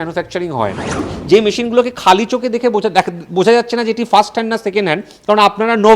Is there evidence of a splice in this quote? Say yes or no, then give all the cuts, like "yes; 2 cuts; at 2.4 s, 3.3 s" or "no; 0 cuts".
yes; 1 cut; at 1.1 s